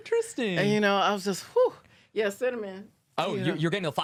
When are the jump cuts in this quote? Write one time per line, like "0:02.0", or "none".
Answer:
none